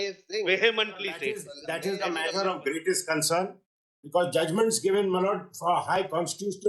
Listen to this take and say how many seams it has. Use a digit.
1